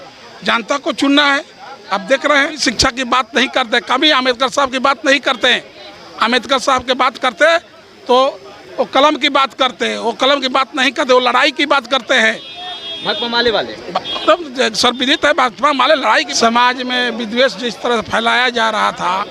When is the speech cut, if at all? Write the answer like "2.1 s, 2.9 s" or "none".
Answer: 2.6 s, 16.3 s